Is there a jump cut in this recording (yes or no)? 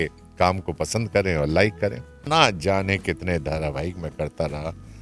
yes